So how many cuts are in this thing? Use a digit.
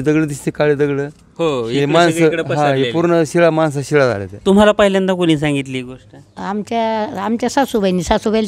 1